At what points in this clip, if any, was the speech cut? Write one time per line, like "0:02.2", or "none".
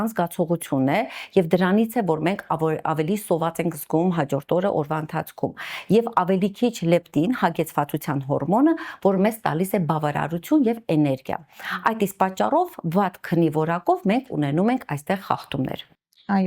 none